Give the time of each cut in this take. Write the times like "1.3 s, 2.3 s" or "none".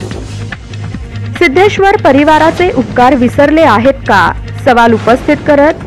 1.4 s